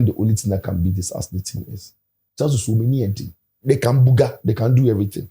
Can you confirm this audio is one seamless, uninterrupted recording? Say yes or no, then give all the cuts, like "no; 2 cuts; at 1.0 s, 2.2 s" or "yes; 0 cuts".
no; 1 cut; at 3.5 s